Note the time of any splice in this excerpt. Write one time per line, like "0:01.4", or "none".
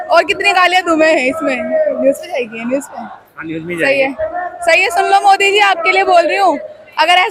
none